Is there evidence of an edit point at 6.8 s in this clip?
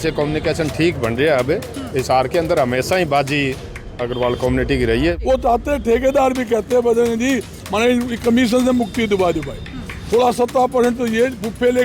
no; 1 cut; at 5.2 s

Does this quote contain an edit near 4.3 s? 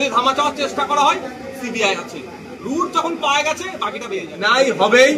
yes; 1 cut; at 4.3 s

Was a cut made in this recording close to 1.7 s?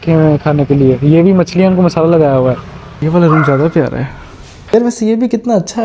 no; 2 cuts; at 3.0 s, 4.6 s

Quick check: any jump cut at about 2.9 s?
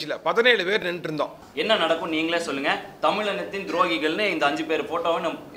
no; 1 cut; at 1.4 s

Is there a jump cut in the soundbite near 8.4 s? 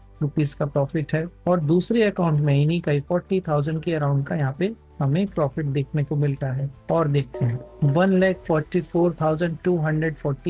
no; 0 cuts

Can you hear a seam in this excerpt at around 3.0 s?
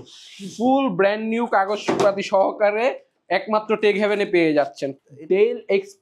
no; 1 cut; at 4.9 s

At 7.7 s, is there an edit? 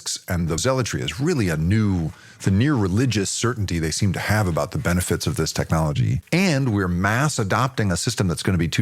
no; 1 cut; at 6.2 s

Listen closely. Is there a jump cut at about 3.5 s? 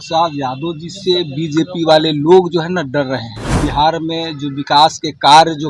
yes; 1 cut; at 3.5 s

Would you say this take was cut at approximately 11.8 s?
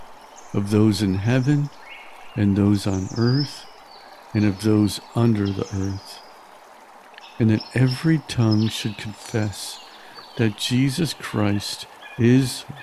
no; 2 cuts; at 6.0 s, 7.4 s

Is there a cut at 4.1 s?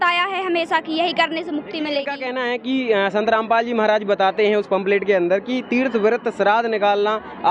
no; 1 cut; at 2.1 s

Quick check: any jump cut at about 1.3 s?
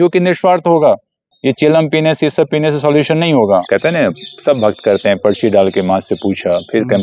yes; 2 cuts; at 1.3 s, 3.6 s

